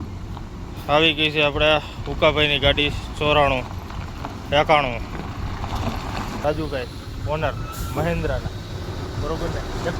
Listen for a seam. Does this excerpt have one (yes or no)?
yes